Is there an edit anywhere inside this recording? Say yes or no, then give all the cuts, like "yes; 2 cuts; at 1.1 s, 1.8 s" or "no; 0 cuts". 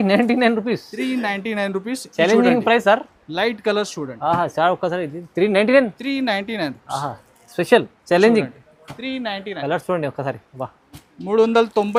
no; 0 cuts